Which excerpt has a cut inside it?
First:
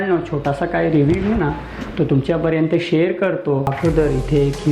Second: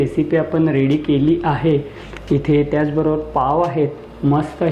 first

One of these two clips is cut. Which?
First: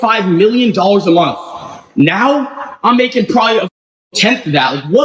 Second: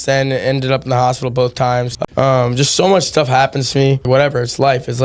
second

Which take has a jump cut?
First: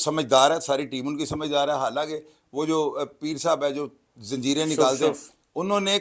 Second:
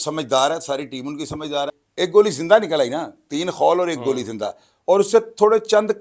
second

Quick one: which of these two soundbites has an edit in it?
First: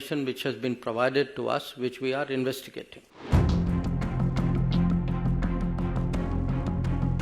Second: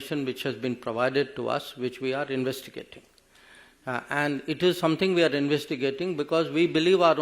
first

